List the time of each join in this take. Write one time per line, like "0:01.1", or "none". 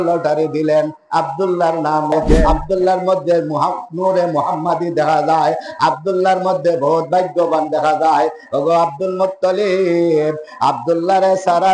0:02.5